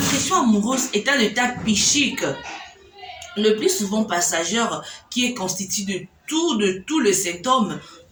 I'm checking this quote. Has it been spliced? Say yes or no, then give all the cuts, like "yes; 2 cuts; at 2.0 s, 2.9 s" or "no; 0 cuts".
no; 0 cuts